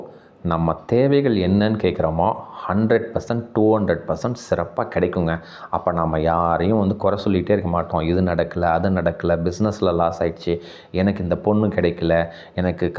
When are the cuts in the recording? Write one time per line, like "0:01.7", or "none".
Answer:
none